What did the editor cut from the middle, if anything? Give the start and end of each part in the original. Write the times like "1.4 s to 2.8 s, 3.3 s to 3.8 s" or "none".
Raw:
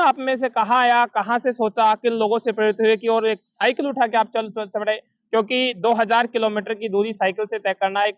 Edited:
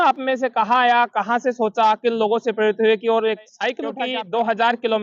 4.0 s to 5.5 s